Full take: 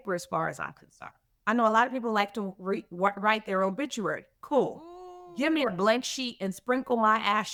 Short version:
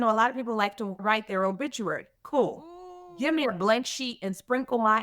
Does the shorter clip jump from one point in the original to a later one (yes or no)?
yes